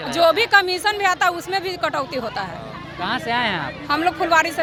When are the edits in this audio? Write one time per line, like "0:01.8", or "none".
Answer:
none